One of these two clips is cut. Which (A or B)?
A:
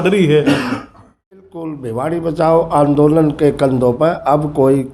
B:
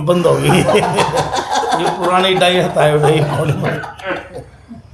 A